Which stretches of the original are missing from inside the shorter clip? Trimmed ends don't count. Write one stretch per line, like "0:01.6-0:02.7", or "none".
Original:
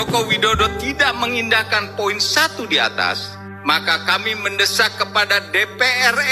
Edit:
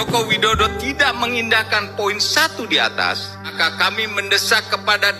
0:03.5-0:03.8